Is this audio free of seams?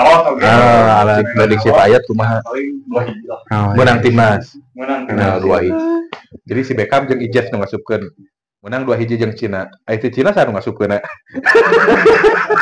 no; 1 cut; at 5.7 s

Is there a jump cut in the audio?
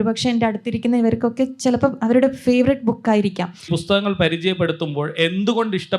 yes; 1 cut; at 3.7 s

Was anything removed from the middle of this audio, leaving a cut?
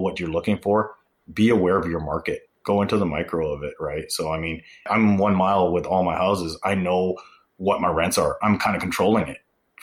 no; 0 cuts

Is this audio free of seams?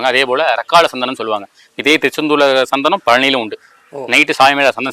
yes; 0 cuts

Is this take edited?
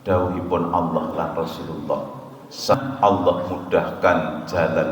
yes; 1 cut; at 2.8 s

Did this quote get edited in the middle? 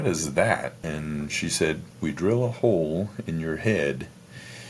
yes; 2 cuts; at 0.8 s, 1.9 s

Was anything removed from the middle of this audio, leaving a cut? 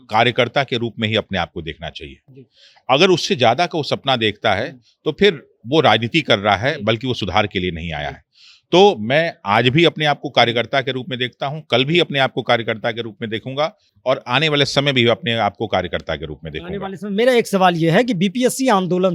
no; 0 cuts

